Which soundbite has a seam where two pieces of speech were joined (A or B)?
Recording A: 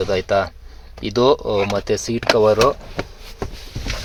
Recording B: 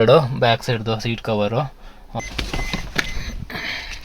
B